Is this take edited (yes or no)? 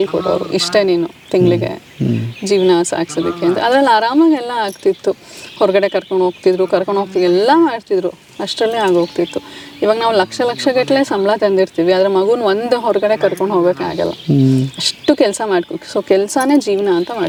no